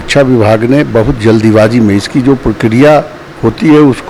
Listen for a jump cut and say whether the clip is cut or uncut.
uncut